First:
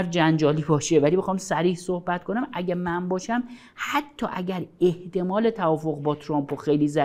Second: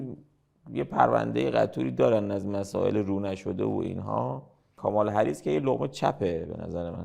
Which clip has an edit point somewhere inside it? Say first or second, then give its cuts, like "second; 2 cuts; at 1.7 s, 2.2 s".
second; 1 cut; at 4.6 s